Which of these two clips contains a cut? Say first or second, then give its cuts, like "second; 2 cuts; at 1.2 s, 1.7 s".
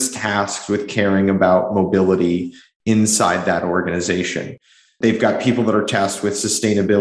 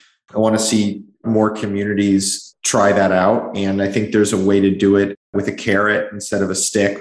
second; 1 cut; at 5.2 s